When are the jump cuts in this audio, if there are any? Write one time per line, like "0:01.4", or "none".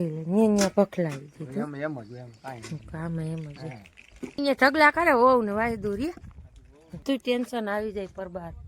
0:04.4
0:07.0